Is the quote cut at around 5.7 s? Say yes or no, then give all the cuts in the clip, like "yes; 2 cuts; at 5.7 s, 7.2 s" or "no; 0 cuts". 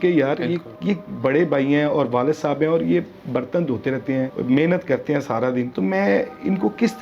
yes; 2 cuts; at 4.4 s, 5.7 s